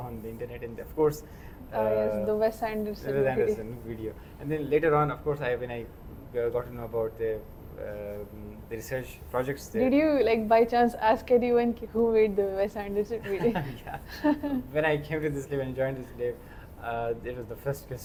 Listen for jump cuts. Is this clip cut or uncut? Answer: uncut